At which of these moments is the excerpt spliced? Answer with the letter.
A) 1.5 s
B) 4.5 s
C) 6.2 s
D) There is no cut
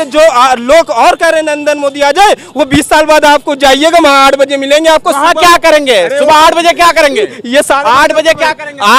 D